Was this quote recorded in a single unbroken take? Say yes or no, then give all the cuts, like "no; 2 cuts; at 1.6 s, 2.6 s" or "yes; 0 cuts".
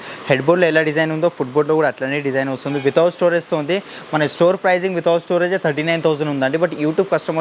yes; 0 cuts